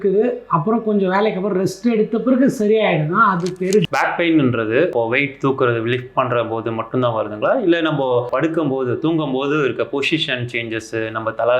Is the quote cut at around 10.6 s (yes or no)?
no